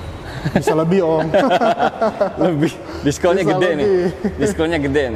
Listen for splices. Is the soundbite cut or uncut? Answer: uncut